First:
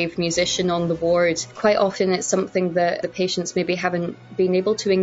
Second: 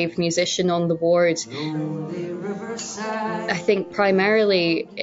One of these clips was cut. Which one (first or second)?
first